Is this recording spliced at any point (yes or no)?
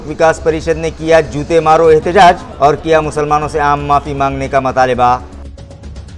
yes